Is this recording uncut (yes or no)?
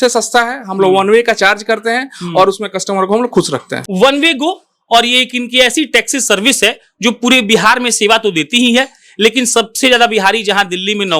no